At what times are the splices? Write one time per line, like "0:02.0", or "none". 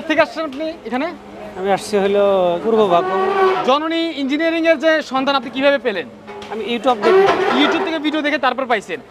0:02.6
0:03.5